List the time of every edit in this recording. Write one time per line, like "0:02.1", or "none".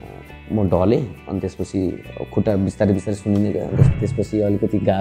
0:03.9